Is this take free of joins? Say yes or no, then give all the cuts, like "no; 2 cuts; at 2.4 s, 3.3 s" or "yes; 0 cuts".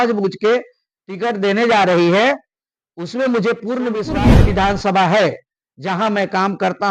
no; 1 cut; at 4.1 s